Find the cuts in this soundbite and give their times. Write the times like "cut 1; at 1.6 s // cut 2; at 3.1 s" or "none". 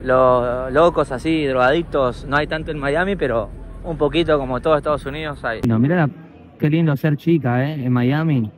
cut 1; at 5.6 s